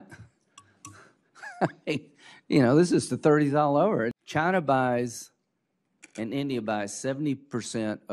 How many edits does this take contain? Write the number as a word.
one